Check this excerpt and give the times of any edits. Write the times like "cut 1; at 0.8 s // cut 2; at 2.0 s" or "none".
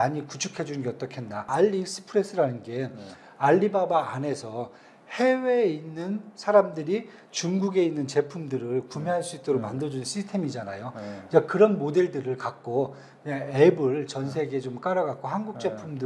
cut 1; at 1.5 s